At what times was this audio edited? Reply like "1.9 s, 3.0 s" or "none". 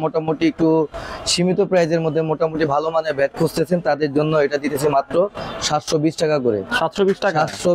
none